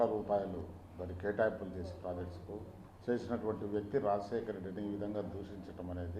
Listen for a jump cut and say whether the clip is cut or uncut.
cut